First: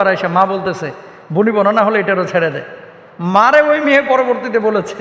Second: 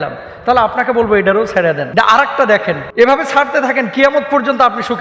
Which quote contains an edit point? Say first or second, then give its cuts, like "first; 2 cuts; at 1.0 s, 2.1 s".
second; 2 cuts; at 1.8 s, 2.9 s